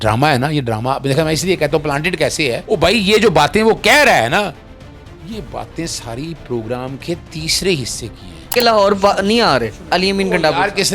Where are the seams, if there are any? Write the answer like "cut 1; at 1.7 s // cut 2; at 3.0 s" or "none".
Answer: cut 1; at 2.6 s // cut 2; at 8.5 s